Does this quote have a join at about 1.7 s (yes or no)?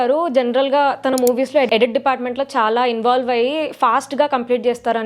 yes